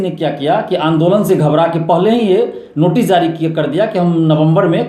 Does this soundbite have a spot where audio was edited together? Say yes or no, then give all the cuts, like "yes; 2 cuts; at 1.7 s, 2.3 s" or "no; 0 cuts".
no; 0 cuts